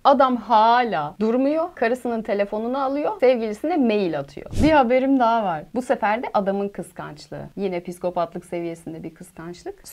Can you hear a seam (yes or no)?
yes